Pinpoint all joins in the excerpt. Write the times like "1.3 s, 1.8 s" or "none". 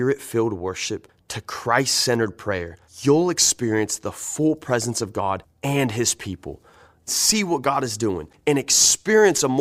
none